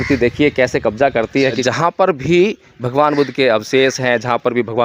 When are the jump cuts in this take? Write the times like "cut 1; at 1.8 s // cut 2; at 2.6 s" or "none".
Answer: cut 1; at 1.6 s